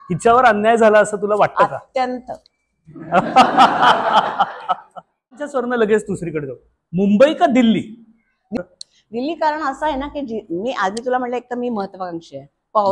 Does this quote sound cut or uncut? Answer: cut